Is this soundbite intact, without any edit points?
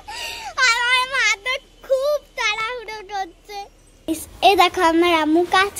no; 1 cut; at 4.1 s

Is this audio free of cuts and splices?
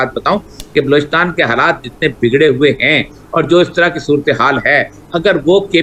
yes; 0 cuts

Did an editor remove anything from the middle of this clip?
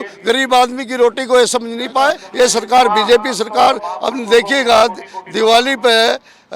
yes; 1 cut; at 2.2 s

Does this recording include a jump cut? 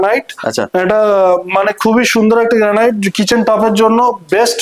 no; 0 cuts

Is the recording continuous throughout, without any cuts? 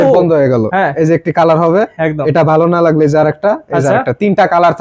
yes; 0 cuts

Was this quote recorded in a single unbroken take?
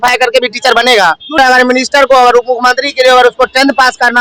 no; 1 cut; at 1.4 s

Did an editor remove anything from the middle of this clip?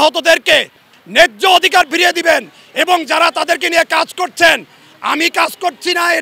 no; 0 cuts

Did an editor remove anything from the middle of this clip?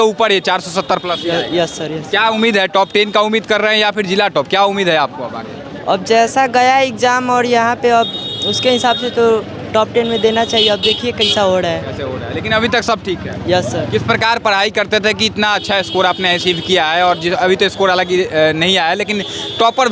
no; 0 cuts

